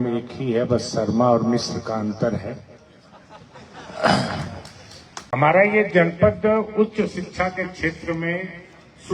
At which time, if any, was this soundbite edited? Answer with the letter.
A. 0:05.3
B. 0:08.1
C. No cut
A